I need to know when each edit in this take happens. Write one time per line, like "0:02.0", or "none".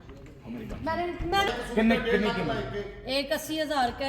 0:01.5